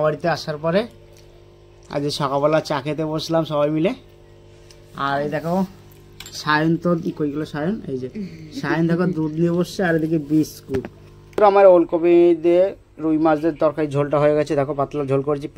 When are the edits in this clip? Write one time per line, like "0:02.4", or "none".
0:11.4